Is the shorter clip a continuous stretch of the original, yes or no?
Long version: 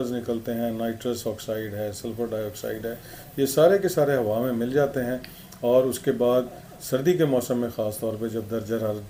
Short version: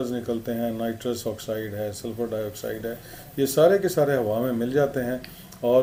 yes